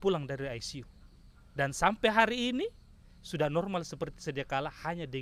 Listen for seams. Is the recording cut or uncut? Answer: uncut